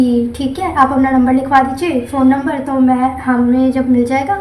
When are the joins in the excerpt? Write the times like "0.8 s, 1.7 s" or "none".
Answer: none